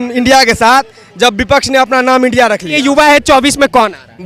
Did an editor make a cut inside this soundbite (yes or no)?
yes